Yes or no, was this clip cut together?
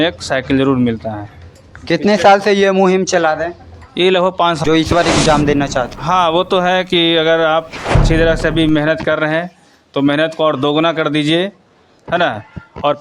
yes